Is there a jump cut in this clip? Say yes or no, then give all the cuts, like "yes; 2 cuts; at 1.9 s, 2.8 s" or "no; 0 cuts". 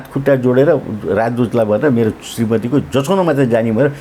no; 0 cuts